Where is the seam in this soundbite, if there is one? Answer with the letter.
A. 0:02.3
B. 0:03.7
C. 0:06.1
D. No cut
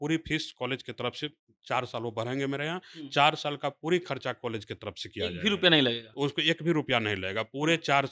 D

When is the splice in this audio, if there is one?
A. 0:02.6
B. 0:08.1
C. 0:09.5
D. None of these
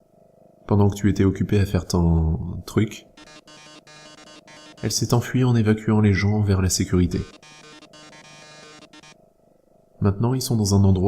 A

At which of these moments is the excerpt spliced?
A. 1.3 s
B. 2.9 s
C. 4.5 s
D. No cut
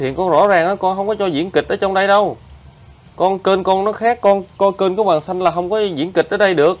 D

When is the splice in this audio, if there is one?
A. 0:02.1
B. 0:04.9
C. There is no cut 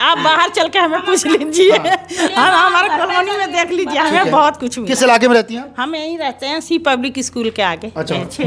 C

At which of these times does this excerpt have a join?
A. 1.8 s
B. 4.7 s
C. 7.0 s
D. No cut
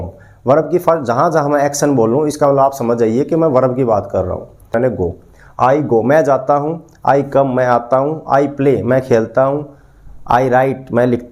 B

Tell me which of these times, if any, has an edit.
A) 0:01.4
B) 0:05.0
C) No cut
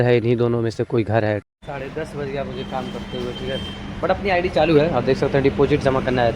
A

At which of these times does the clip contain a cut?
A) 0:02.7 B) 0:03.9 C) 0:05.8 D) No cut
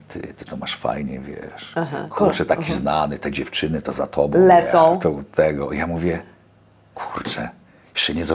D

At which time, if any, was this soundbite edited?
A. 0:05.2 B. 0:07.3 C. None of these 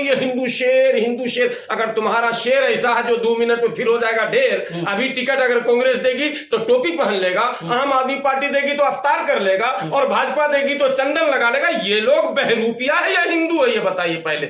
C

